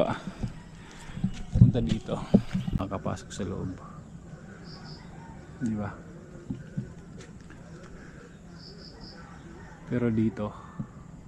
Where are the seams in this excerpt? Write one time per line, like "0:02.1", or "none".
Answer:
0:02.8